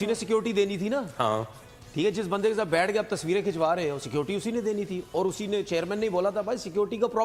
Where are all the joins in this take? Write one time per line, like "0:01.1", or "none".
none